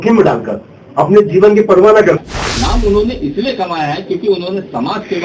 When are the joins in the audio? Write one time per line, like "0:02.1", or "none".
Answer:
0:02.2